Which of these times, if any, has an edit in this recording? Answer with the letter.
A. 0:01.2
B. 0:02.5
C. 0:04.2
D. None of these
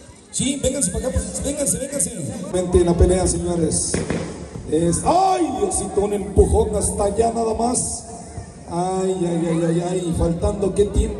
B